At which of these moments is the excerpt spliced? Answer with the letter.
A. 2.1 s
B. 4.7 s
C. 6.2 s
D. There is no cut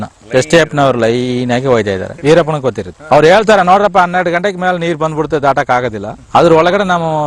A